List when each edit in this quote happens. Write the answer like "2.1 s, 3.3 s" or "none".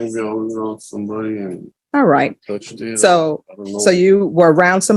1.7 s